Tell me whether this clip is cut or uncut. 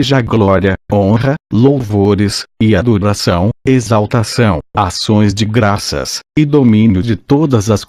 uncut